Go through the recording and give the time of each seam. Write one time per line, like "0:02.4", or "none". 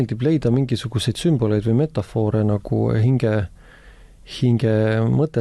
none

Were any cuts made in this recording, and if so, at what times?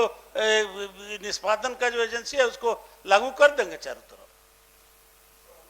none

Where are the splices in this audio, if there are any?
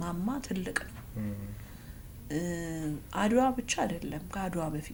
none

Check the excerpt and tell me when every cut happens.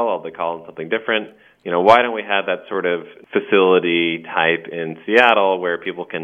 0:03.1

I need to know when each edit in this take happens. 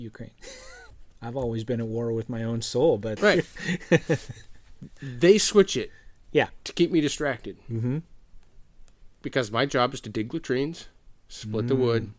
0:00.9
0:03.1

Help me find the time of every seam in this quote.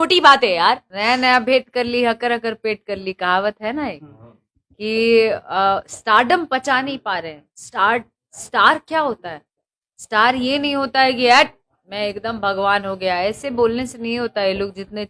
0:00.9

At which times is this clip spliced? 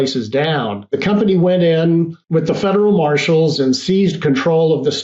0:01.0
0:02.2

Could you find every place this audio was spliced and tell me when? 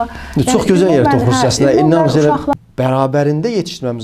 0:02.5

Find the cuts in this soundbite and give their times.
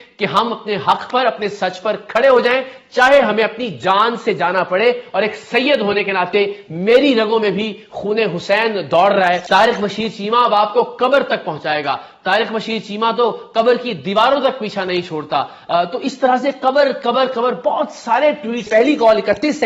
0:09.4
0:18.7

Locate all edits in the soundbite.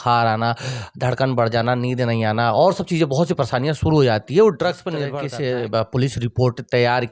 0:05.1

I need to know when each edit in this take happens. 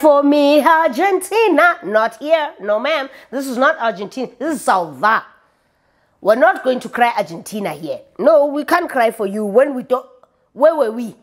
none

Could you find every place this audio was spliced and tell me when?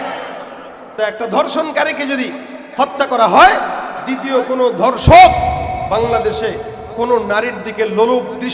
0:01.0

